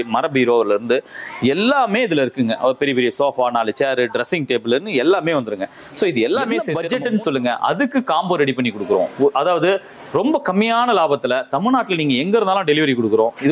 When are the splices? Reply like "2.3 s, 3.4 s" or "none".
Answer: 6.7 s